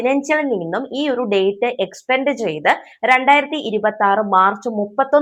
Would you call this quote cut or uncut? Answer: uncut